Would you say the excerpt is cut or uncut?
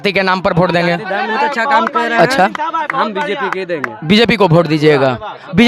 cut